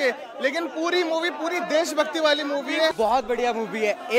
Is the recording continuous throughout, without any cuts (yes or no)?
no